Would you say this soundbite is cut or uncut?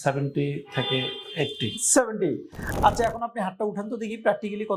cut